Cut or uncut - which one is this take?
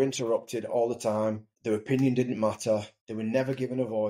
cut